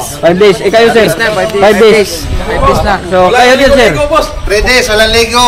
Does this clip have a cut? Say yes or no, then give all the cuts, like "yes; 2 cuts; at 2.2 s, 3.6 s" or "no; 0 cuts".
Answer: no; 0 cuts